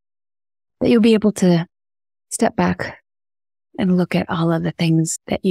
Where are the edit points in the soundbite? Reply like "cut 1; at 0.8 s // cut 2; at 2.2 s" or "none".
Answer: none